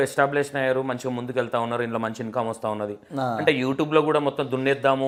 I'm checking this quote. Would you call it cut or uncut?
uncut